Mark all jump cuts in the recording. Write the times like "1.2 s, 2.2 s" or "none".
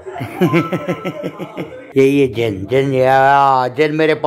1.8 s